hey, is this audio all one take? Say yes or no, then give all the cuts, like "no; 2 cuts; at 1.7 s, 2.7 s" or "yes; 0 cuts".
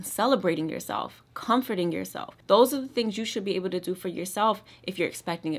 yes; 0 cuts